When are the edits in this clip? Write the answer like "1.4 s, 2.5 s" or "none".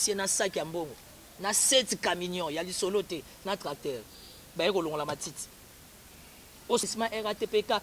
6.8 s